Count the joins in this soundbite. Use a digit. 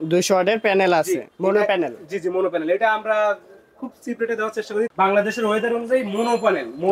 1